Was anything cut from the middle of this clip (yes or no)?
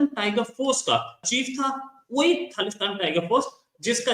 yes